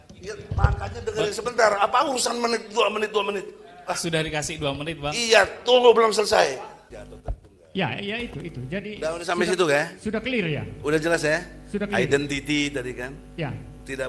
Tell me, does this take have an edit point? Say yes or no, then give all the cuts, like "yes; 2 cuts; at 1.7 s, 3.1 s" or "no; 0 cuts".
yes; 1 cut; at 6.9 s